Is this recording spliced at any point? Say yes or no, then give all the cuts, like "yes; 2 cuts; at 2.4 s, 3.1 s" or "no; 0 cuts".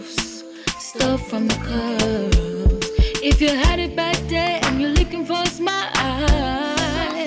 no; 0 cuts